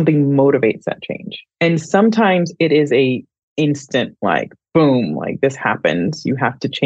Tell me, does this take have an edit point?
no; 0 cuts

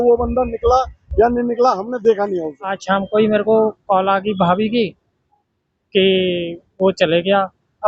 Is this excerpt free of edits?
no; 1 cut; at 2.8 s

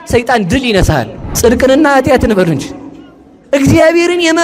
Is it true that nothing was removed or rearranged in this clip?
no; 1 cut; at 1.2 s

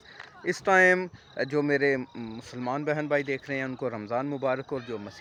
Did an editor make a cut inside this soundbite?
no; 0 cuts

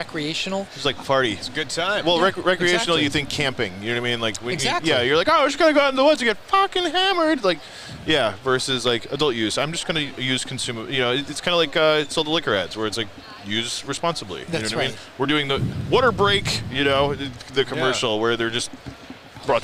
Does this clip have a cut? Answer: no; 0 cuts

